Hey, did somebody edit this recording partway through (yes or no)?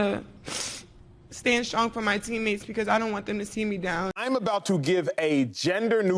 yes